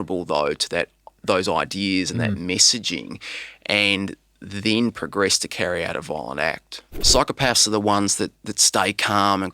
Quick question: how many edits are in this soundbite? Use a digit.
1